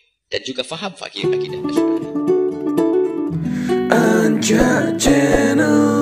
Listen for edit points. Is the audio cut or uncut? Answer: cut